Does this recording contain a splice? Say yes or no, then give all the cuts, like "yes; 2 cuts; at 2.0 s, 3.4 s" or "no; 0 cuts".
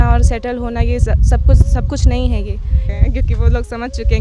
yes; 1 cut; at 2.9 s